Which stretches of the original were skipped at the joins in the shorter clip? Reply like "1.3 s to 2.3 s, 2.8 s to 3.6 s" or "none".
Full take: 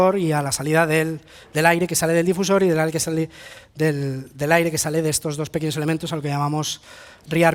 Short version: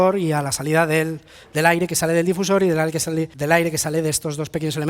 3.3 s to 4.3 s